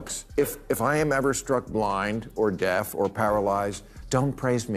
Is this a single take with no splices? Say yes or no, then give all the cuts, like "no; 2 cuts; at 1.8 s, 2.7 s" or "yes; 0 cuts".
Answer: yes; 0 cuts